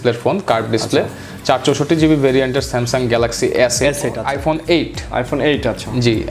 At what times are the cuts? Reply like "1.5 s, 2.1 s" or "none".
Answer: 4.3 s